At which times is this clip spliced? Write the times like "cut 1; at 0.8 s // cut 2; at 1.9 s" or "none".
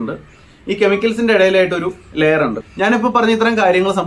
cut 1; at 2.6 s